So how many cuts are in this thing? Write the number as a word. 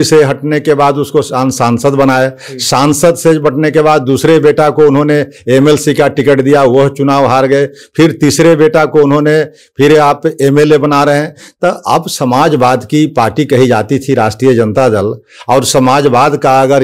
zero